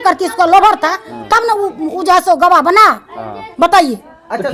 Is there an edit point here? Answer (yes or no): no